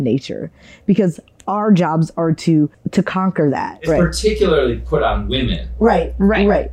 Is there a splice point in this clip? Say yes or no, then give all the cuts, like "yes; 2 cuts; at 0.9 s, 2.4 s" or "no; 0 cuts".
yes; 2 cuts; at 2.8 s, 3.9 s